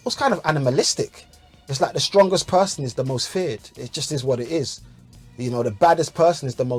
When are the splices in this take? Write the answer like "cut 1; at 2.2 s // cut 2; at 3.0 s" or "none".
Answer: none